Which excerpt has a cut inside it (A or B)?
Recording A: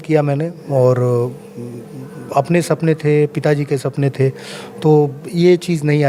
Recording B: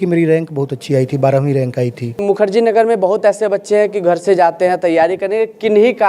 B